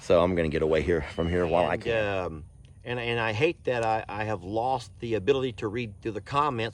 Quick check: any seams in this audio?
yes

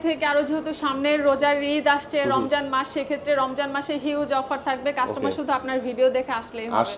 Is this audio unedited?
yes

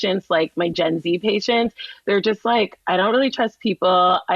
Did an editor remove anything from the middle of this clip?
no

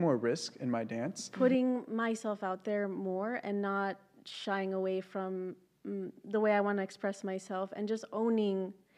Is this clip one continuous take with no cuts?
no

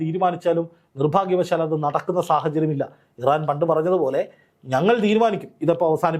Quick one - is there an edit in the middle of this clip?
no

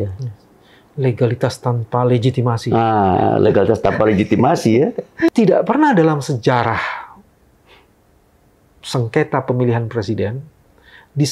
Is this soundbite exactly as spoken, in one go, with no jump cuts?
no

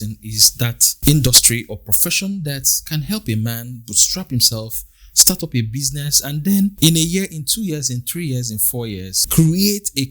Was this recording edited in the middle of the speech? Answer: yes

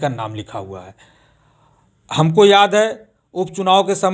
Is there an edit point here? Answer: no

